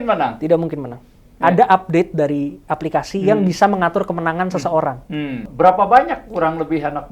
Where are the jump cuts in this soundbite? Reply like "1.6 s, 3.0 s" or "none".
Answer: 1.3 s, 5.4 s